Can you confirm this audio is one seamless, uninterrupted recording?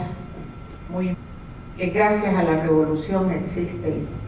yes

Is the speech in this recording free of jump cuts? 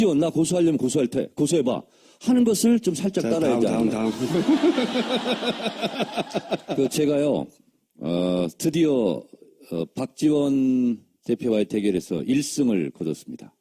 no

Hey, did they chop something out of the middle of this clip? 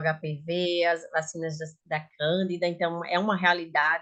no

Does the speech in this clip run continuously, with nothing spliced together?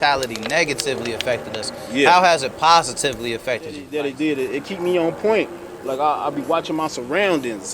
no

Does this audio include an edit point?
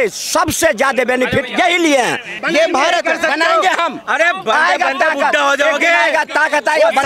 yes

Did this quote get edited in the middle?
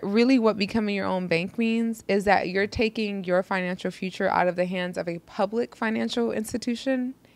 no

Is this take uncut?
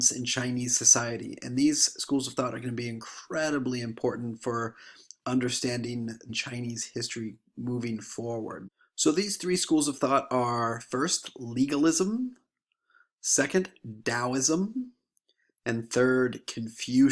yes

